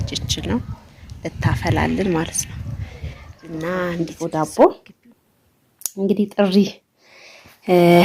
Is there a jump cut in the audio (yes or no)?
yes